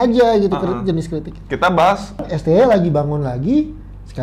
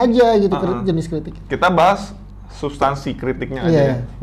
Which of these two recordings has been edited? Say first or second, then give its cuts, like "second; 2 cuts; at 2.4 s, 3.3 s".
first; 1 cut; at 2.3 s